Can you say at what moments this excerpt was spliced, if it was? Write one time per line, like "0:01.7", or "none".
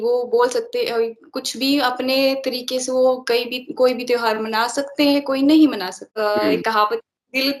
0:06.0